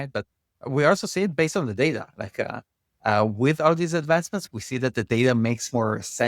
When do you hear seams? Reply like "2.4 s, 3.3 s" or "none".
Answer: none